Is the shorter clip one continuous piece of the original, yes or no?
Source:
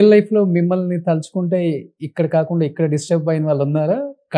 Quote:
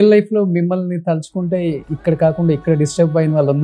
no